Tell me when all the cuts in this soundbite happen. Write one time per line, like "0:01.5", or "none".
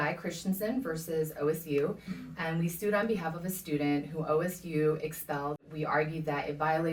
0:05.7